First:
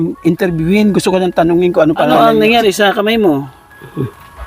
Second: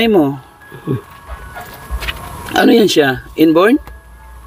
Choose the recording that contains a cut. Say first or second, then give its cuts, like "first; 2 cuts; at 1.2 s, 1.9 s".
first; 1 cut; at 2.1 s